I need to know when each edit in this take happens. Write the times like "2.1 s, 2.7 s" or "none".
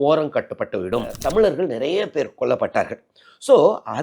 1.2 s